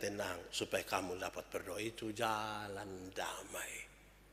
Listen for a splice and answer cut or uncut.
uncut